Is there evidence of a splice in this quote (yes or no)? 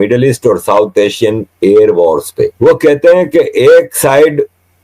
yes